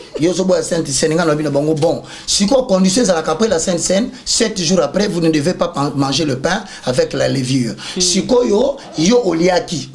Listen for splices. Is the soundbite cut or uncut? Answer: uncut